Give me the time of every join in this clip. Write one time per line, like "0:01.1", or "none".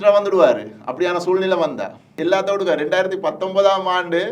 0:02.1

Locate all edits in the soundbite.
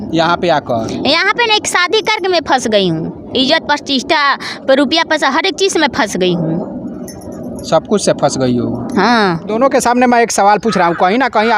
0:09.5

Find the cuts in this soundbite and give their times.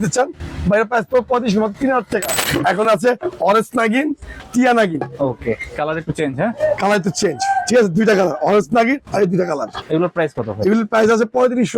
0:02.4
0:09.8

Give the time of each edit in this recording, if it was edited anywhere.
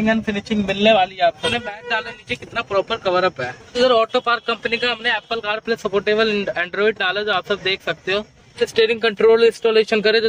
0:01.5
0:03.7
0:08.6

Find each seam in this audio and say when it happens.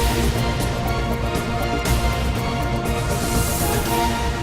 none

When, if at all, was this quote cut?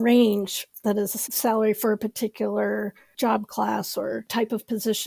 0:01.2
0:03.0
0:04.3

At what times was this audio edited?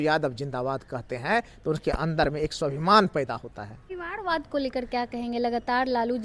0:03.9

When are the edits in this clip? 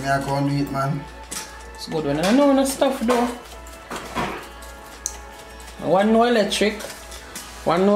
none

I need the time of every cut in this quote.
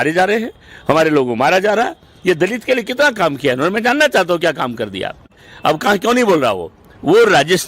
0:05.4

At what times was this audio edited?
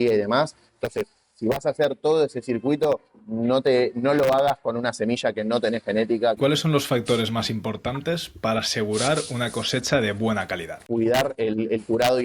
0:06.4
0:10.8

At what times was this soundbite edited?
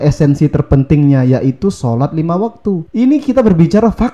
0:02.8

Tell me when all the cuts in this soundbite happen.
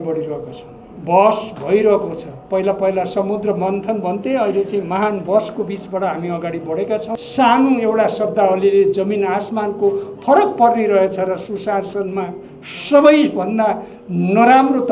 0:07.1

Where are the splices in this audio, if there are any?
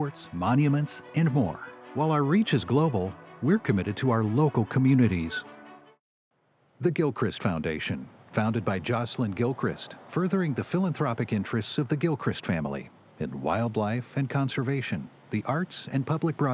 none

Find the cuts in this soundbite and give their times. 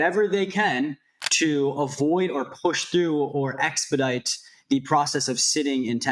none

